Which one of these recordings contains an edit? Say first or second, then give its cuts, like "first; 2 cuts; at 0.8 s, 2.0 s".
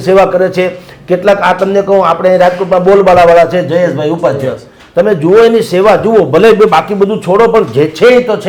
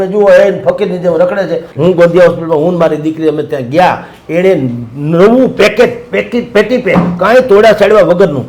second; 1 cut; at 1.6 s